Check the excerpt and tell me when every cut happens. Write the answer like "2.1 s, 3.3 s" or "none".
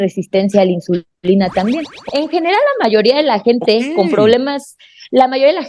2.0 s